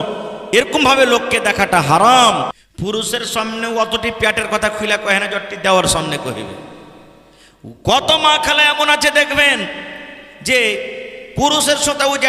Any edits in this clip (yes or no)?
yes